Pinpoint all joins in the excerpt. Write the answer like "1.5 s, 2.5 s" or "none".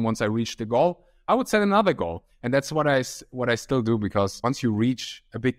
4.3 s